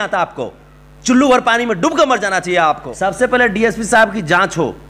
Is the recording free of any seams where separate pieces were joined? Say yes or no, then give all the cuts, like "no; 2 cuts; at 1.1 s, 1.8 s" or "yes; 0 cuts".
no; 1 cut; at 2.9 s